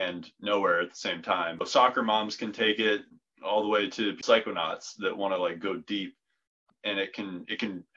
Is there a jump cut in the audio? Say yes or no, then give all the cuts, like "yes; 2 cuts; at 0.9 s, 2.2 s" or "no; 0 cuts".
yes; 4 cuts; at 1.7 s, 3.1 s, 4.2 s, 6.6 s